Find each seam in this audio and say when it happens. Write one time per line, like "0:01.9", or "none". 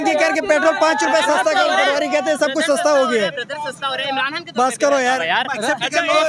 none